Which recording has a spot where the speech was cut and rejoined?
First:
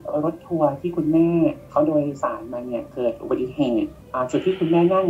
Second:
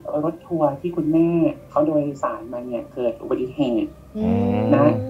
first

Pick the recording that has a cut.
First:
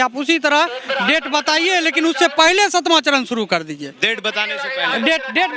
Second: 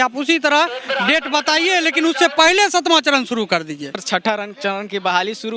second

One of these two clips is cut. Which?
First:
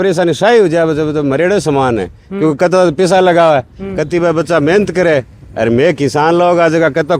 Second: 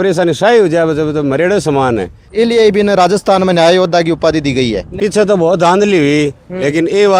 second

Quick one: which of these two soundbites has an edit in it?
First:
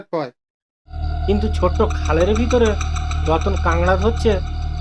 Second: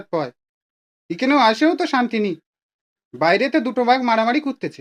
first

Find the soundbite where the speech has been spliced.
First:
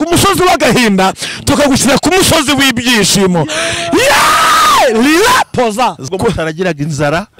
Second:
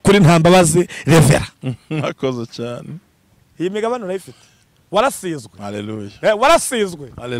first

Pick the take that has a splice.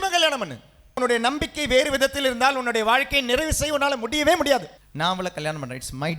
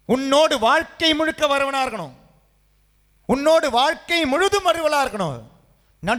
first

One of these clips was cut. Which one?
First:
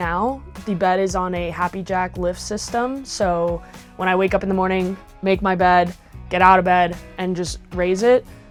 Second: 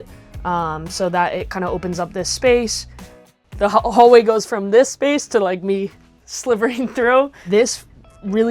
second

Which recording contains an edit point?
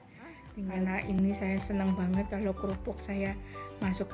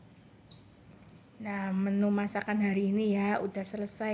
first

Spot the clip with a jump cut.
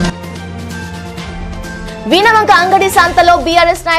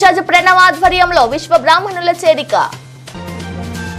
first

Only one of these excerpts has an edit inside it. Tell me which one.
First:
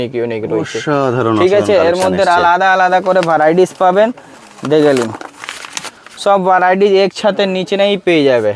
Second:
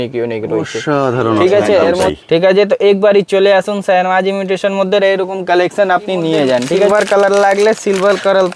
second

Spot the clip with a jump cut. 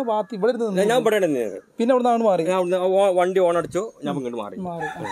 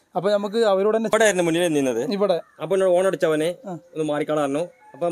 second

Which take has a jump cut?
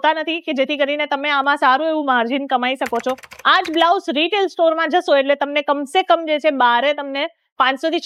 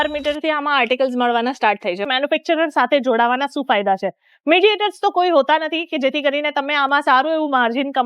second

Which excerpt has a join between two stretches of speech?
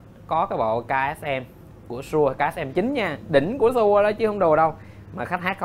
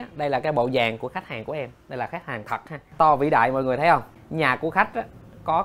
second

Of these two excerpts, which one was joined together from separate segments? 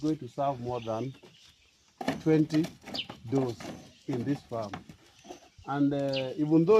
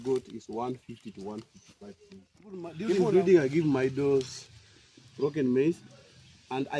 second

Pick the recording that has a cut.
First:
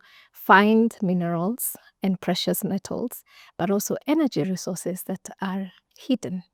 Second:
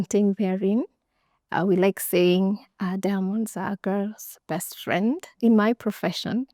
second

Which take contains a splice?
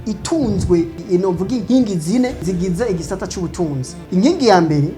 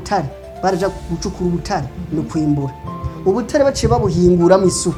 first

